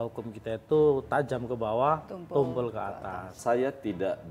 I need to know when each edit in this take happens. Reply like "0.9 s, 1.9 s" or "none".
1.0 s, 3.4 s